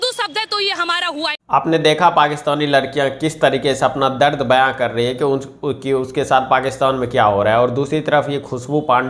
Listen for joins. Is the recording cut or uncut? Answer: uncut